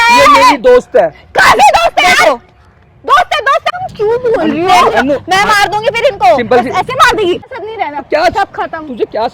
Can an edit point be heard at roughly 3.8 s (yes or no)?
yes